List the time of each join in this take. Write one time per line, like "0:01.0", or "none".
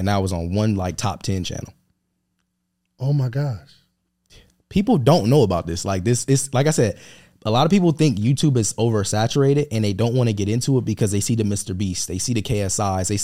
0:01.2